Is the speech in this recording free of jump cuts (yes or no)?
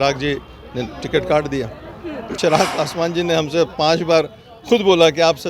no